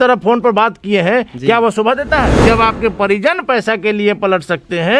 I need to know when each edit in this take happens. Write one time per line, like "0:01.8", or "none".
0:02.4